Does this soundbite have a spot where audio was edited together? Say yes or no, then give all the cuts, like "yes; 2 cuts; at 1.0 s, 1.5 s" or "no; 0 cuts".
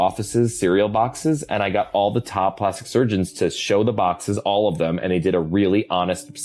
no; 0 cuts